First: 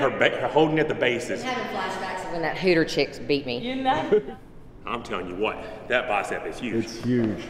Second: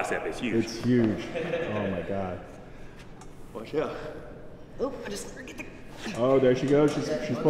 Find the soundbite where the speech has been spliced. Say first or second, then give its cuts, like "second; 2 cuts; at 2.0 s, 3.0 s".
first; 1 cut; at 4.2 s